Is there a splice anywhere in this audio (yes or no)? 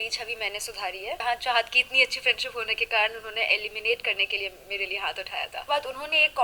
yes